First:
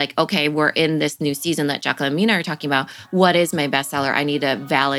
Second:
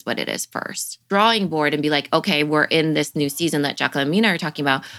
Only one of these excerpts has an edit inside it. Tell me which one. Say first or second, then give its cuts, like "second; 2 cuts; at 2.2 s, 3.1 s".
second; 1 cut; at 1.0 s